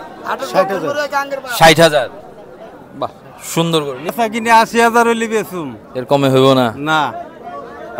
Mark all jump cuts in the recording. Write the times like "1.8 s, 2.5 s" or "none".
4.1 s